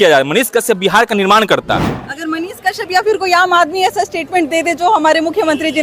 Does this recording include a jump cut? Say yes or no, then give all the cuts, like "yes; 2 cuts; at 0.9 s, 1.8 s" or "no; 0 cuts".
yes; 1 cut; at 1.9 s